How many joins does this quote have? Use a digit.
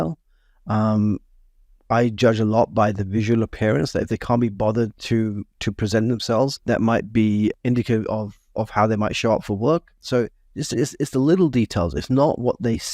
3